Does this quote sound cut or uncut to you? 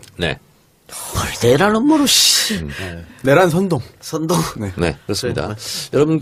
uncut